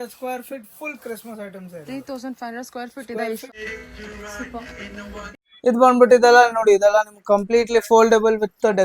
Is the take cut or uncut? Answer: cut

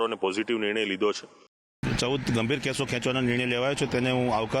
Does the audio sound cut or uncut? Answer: cut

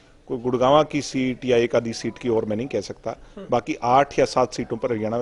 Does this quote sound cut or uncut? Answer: uncut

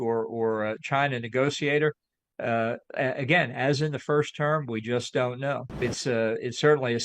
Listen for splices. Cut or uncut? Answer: cut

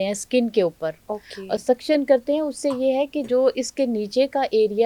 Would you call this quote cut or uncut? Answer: uncut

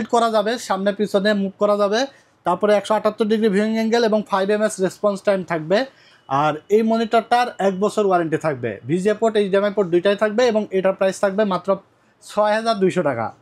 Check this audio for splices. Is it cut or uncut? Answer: uncut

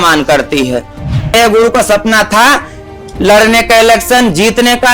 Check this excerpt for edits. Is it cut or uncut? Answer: cut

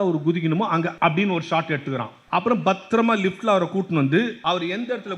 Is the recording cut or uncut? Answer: cut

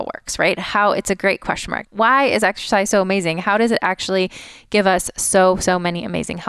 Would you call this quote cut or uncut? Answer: cut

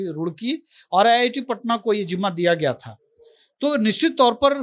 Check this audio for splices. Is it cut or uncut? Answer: uncut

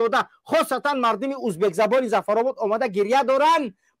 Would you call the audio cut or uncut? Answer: uncut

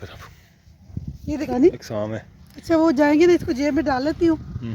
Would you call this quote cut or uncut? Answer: cut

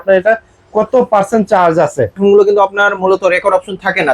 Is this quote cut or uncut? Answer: cut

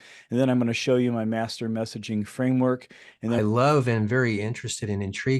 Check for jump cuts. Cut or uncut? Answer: cut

